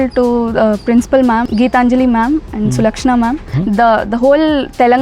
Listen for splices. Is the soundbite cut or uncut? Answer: cut